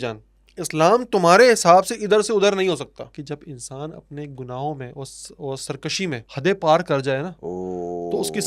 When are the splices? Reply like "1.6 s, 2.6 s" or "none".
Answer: 3.2 s, 6.3 s, 7.4 s